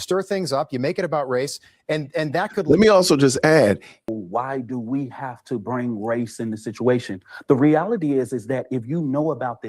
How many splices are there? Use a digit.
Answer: 1